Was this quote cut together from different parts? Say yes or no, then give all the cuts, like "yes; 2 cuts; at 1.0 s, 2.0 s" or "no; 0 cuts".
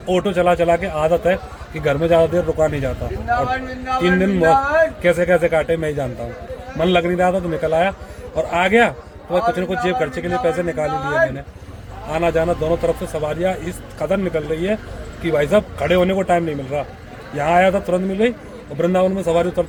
no; 0 cuts